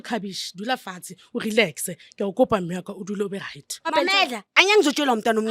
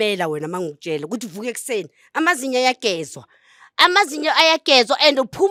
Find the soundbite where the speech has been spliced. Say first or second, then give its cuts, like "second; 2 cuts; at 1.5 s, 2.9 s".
first; 1 cut; at 3.9 s